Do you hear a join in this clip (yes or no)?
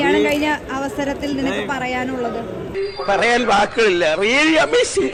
no